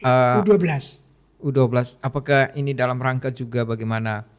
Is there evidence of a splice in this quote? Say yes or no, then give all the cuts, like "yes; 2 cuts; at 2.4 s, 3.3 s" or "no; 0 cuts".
no; 0 cuts